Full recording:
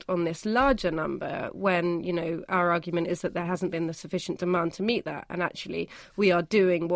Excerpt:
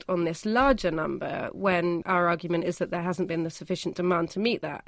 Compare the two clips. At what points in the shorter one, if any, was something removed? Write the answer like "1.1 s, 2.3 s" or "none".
2.0 s